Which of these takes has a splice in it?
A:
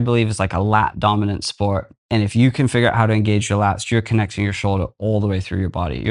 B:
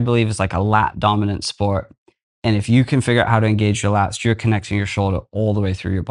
A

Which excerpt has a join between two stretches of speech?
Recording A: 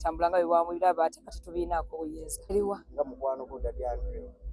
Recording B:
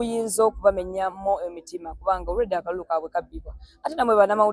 A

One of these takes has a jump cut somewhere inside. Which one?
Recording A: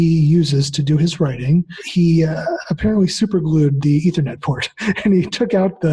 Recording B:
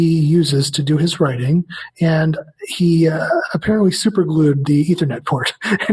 A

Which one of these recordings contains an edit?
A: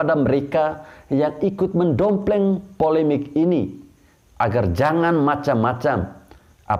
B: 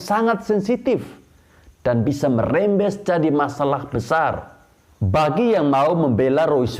B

